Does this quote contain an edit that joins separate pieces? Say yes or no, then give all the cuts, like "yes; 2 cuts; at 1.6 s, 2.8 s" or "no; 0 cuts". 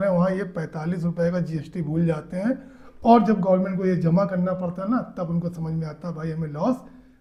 no; 0 cuts